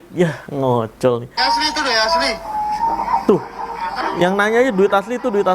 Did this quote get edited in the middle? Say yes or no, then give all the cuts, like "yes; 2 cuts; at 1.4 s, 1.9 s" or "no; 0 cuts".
yes; 1 cut; at 1.3 s